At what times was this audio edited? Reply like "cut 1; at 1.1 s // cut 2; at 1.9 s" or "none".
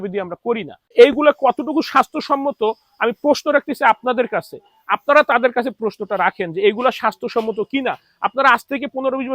cut 1; at 0.9 s